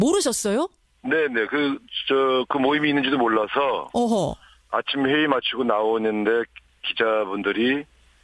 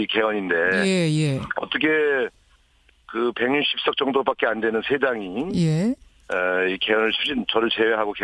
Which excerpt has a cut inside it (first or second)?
first